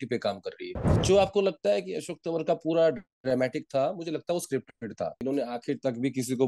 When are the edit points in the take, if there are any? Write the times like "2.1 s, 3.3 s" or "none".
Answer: 1.0 s, 5.2 s